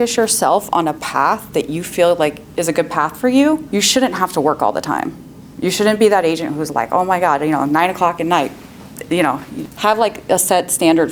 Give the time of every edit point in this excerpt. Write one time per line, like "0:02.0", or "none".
none